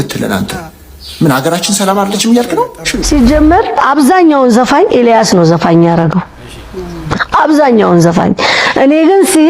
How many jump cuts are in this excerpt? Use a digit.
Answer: 1